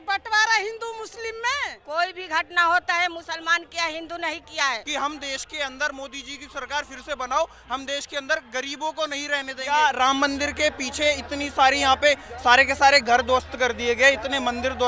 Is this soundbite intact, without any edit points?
no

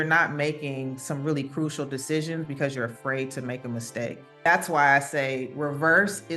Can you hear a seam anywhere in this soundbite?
yes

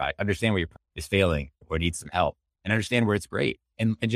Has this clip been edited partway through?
no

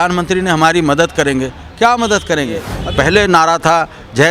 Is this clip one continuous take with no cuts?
no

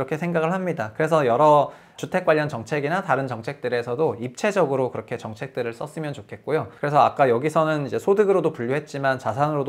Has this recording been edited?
yes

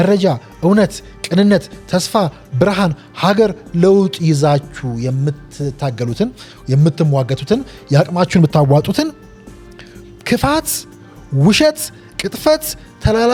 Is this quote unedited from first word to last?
yes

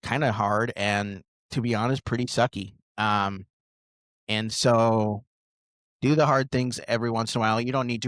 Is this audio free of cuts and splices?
yes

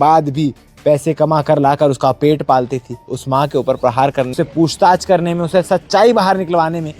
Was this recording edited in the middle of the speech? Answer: yes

